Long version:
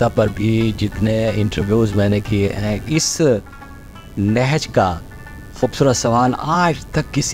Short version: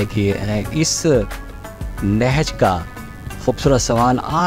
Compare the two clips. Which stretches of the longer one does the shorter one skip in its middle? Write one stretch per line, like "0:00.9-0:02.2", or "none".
none